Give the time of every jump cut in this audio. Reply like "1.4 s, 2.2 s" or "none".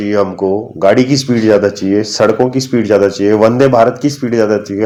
none